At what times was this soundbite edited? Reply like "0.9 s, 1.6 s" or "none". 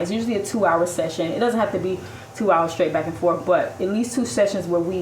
none